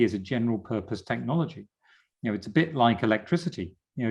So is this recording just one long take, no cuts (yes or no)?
yes